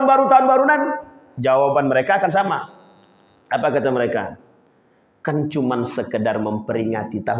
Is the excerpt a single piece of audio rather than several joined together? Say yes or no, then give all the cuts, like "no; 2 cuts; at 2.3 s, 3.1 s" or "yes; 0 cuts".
yes; 0 cuts